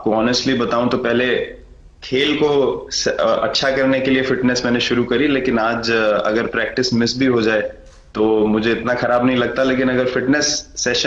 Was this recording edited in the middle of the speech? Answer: no; 0 cuts

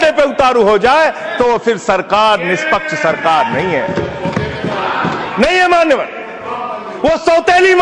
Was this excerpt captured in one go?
yes; 0 cuts

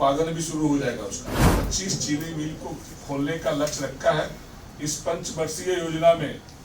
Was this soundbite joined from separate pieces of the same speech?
yes; 1 cut; at 1.5 s

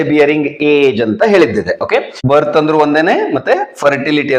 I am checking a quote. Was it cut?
yes; 1 cut; at 2.1 s

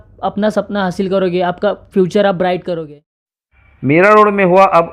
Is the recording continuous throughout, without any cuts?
no; 1 cut; at 3.6 s

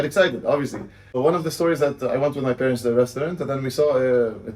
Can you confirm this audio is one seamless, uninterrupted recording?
no; 1 cut; at 1.2 s

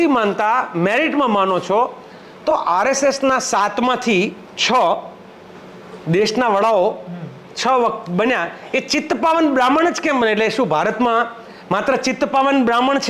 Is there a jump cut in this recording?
no; 0 cuts

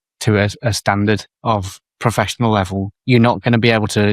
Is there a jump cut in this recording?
yes; 2 cuts; at 1.6 s, 2.9 s

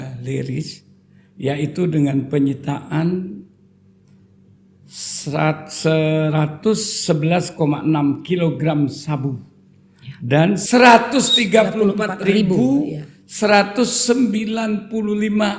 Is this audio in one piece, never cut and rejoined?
no; 1 cut; at 10.6 s

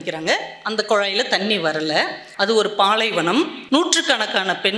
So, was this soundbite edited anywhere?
yes; 2 cuts; at 2.2 s, 3.6 s

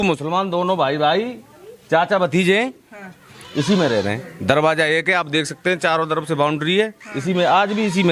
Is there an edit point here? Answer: no; 0 cuts

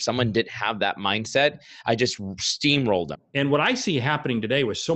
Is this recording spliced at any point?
yes; 1 cut; at 3.2 s

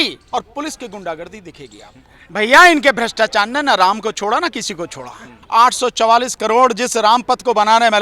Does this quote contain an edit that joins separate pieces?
yes; 2 cuts; at 2.2 s, 5.4 s

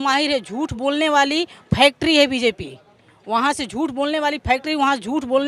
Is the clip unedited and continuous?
yes; 0 cuts

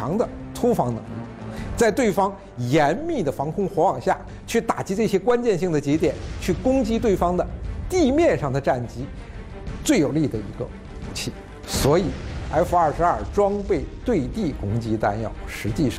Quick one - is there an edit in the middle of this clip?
no; 0 cuts

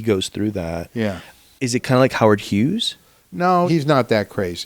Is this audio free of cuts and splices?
no; 2 cuts; at 1.4 s, 3.7 s

